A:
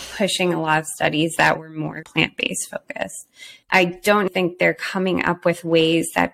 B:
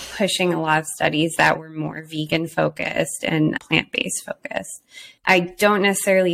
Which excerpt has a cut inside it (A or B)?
A